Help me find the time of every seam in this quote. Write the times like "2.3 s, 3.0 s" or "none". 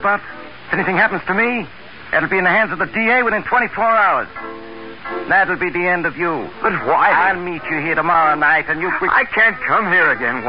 3.7 s